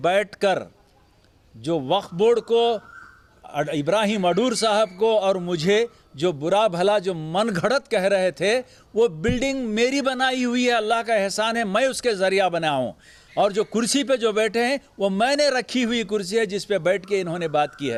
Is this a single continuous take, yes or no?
yes